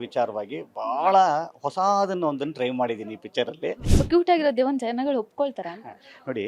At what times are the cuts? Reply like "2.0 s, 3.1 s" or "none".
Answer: 3.9 s

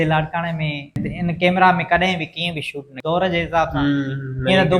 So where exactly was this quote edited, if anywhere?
1.1 s, 2.8 s

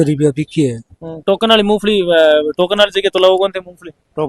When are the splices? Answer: 1.1 s

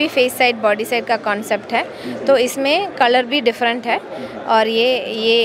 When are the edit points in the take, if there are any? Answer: none

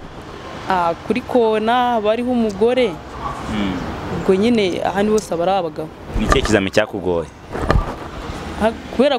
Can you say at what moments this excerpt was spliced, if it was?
6.0 s

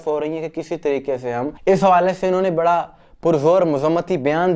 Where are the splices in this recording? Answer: 1.5 s

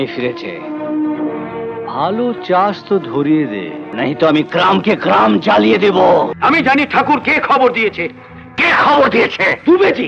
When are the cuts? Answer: 3.8 s, 6.3 s

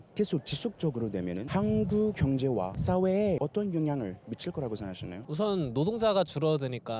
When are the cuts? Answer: 1.4 s, 2.4 s, 3.4 s, 5.2 s

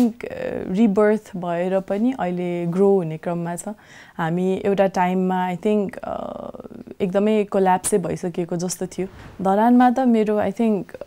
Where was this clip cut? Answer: 9.1 s

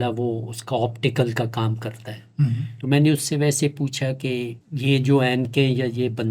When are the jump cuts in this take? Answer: 4.6 s

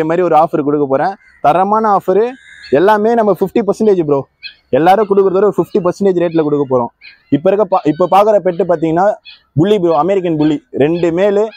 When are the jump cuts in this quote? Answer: none

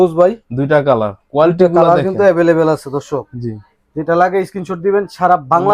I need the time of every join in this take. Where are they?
none

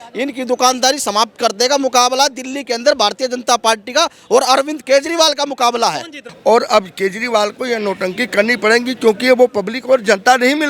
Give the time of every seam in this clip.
6.2 s

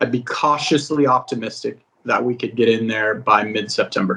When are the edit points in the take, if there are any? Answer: none

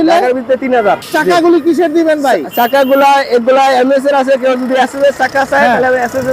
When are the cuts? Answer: 1.0 s

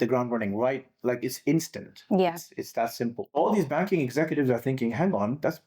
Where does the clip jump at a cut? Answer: 3.3 s

